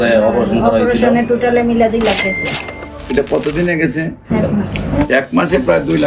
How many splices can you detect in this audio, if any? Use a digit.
1